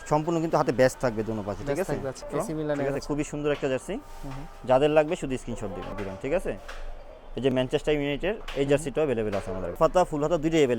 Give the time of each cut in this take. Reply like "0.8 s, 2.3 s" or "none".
2.3 s, 5.9 s, 9.8 s